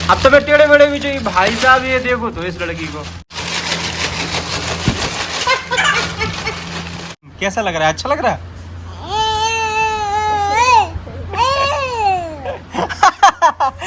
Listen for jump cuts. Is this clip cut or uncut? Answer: cut